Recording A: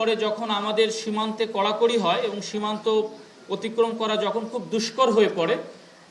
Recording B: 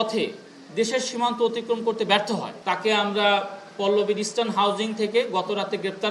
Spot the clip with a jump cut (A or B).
B